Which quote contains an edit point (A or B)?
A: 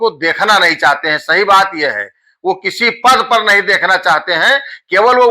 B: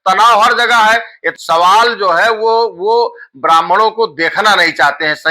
B